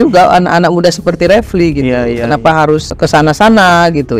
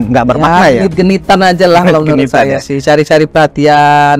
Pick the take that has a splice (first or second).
first